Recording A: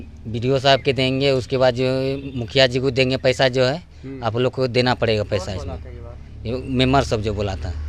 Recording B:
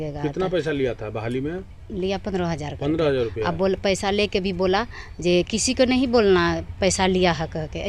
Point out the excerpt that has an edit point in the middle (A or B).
B